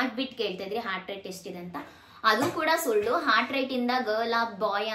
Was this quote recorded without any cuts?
yes; 0 cuts

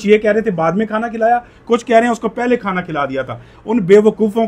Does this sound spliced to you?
no; 0 cuts

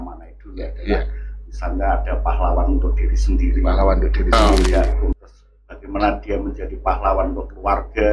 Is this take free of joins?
no; 1 cut; at 5.1 s

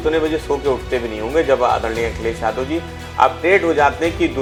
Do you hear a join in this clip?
no; 0 cuts

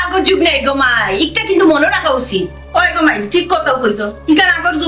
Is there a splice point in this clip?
no; 0 cuts

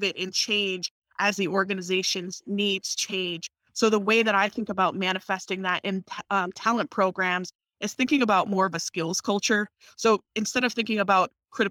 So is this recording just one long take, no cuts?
yes; 0 cuts

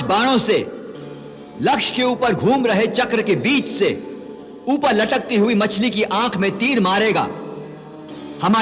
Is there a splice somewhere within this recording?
no; 0 cuts

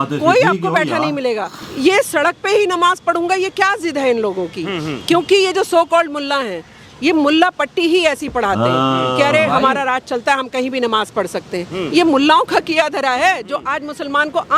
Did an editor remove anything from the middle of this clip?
yes; 1 cut; at 1.6 s

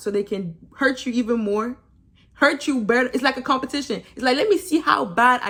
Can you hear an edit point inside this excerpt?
no; 0 cuts

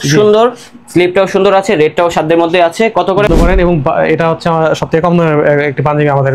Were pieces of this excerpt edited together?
yes; 1 cut; at 3.3 s

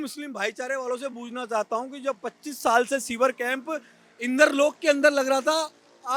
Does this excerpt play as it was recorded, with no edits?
yes; 0 cuts

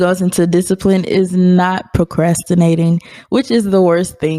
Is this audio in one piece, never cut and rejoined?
yes; 0 cuts

